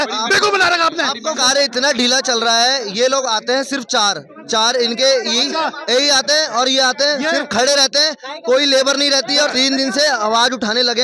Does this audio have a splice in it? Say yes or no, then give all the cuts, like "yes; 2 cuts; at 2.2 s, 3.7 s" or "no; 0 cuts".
yes; 2 cuts; at 1.4 s, 9.5 s